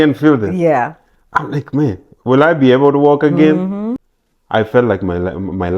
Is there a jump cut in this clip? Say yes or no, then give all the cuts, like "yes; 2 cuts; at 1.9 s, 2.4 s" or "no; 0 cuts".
yes; 1 cut; at 4.1 s